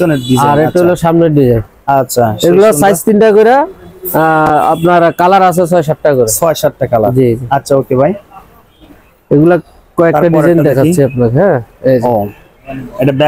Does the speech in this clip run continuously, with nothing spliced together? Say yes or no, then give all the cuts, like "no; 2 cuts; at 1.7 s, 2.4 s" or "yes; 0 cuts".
yes; 0 cuts